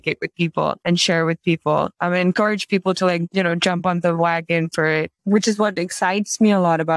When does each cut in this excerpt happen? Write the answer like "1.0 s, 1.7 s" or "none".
0.8 s, 2.0 s, 3.3 s, 5.2 s